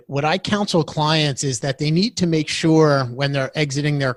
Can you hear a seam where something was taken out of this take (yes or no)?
no